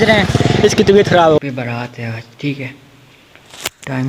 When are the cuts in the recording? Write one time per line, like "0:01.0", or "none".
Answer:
0:01.4